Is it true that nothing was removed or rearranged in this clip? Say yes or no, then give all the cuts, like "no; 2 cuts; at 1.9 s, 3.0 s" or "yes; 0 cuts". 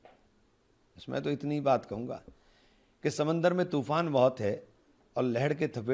yes; 0 cuts